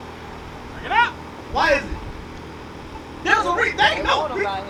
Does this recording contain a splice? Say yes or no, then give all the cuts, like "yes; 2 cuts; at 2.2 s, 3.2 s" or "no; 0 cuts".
no; 0 cuts